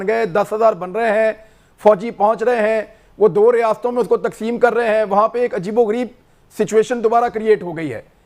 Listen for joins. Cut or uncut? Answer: uncut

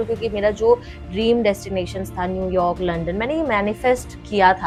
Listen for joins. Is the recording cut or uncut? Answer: uncut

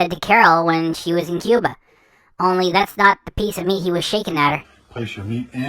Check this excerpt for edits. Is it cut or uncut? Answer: cut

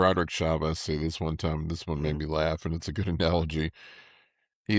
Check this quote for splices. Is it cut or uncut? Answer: uncut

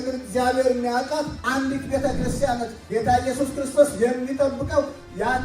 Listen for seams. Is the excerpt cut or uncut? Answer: cut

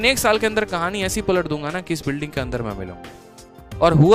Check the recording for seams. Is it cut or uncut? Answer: uncut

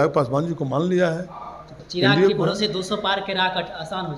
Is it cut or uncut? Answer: cut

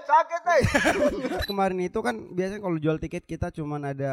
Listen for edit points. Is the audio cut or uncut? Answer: cut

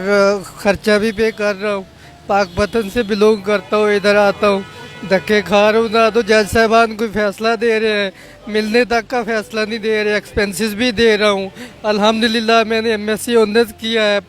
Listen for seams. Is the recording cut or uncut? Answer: uncut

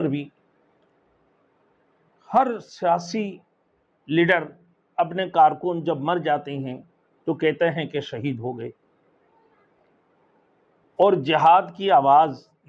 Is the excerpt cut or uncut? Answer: uncut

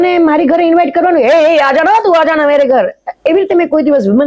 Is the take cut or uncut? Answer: uncut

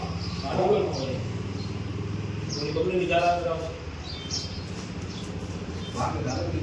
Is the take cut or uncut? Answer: uncut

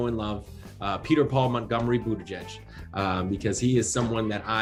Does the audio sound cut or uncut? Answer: uncut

